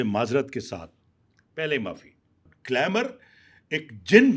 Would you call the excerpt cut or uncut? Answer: cut